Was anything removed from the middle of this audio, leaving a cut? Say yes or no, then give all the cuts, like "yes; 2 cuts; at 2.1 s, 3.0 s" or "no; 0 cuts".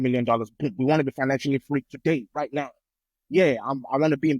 no; 0 cuts